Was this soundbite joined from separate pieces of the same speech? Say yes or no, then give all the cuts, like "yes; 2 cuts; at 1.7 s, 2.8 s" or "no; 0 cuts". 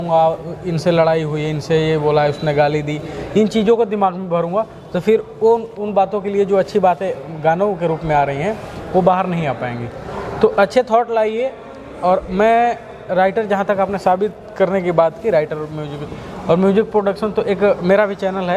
no; 0 cuts